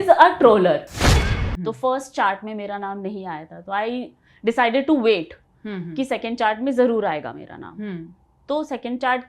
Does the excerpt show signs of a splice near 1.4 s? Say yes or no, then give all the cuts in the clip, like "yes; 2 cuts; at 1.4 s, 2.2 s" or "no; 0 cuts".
yes; 1 cut; at 1.4 s